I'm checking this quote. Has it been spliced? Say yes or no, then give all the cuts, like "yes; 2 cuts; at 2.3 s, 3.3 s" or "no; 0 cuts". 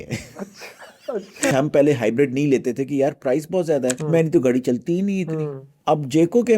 yes; 3 cuts; at 1.5 s, 4.0 s, 5.6 s